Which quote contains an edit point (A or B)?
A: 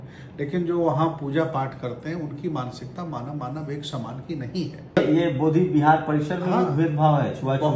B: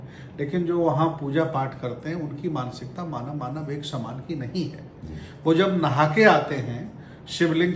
A